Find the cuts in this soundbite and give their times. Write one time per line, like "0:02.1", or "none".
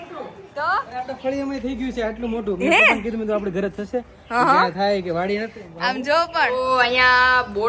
0:06.5